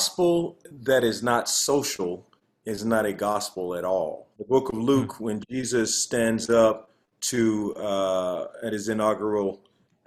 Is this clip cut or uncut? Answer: cut